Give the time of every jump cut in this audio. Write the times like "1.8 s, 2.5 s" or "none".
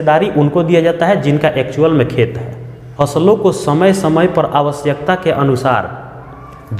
2.9 s